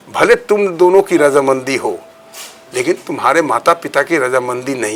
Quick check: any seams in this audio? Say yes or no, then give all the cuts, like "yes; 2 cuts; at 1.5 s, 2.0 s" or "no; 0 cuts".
no; 0 cuts